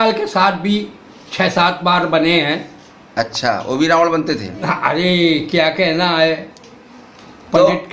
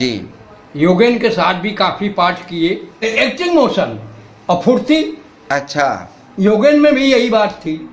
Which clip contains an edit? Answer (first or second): second